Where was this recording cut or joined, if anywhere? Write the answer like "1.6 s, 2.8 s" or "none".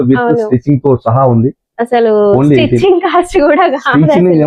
none